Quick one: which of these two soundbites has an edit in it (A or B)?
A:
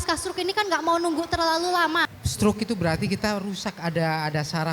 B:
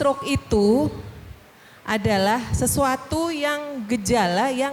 A